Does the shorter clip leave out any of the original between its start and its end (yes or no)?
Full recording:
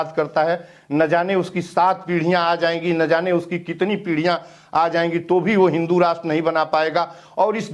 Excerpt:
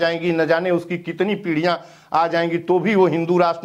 no